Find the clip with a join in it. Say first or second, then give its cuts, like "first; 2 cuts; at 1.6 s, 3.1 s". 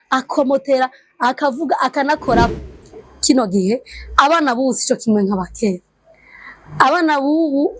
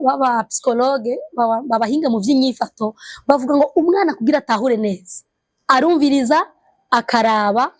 first; 1 cut; at 2.6 s